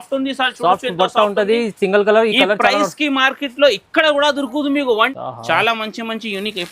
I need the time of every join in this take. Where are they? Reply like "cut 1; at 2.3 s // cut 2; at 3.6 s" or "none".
cut 1; at 5.1 s